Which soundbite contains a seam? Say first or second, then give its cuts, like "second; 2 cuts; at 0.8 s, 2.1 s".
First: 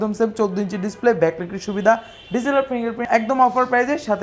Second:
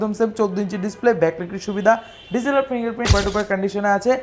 second; 1 cut; at 3.0 s